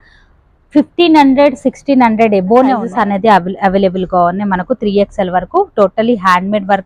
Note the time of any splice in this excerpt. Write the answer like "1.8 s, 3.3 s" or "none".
2.9 s